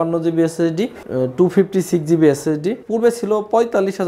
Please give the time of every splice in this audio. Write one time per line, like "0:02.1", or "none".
0:01.0
0:02.8